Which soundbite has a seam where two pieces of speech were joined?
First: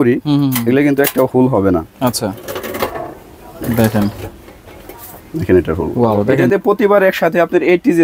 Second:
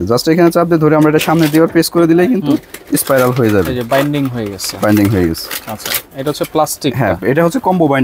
first; 1 cut; at 6.3 s

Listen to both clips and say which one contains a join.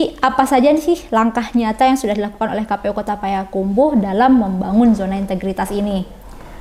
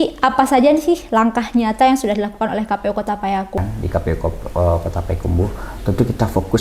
second; 1 cut; at 3.6 s

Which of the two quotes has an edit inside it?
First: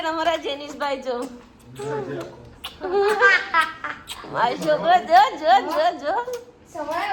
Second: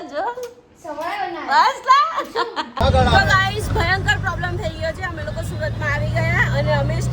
second; 1 cut; at 2.7 s

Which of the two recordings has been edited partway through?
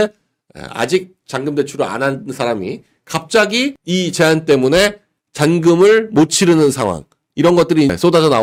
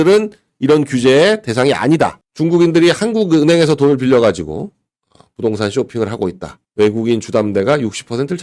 second; 1 cut; at 2.2 s

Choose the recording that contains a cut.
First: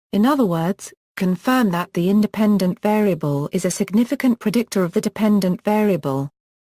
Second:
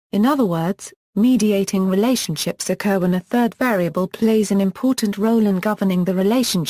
first; 1 cut; at 0.9 s

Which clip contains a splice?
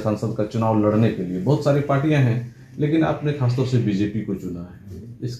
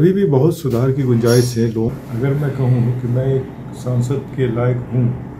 second; 1 cut; at 1.9 s

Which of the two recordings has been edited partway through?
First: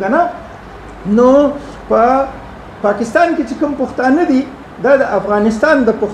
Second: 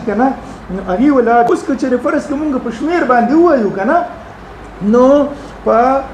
second; 1 cut; at 1.5 s

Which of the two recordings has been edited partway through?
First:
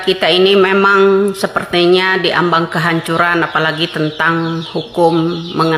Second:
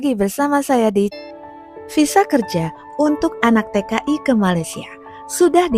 second; 1 cut; at 1.1 s

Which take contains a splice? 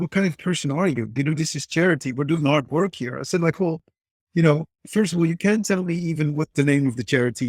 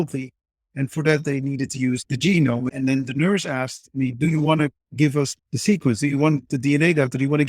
second; 3 cuts; at 2.0 s, 2.7 s, 5.3 s

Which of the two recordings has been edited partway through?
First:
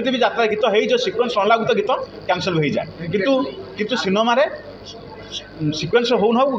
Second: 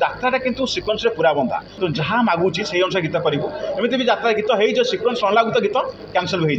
second; 1 cut; at 1.7 s

